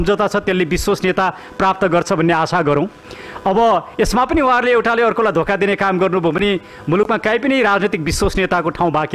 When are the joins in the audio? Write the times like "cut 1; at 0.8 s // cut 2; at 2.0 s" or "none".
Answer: none